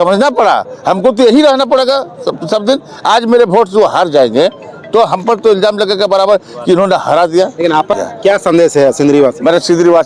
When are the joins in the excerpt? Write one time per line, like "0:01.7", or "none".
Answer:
0:08.0